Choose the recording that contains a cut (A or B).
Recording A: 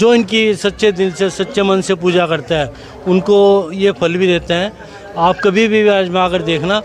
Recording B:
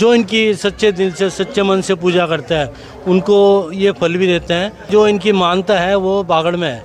B